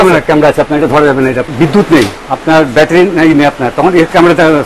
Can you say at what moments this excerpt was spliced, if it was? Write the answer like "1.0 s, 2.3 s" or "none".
1.5 s, 2.2 s